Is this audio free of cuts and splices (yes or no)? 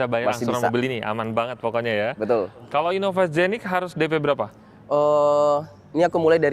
no